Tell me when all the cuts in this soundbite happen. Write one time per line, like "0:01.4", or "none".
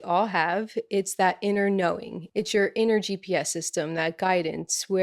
0:02.1